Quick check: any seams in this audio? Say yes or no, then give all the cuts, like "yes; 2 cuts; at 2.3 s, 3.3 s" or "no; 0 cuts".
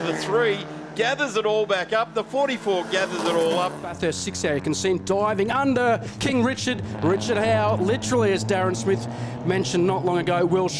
yes; 1 cut; at 3.9 s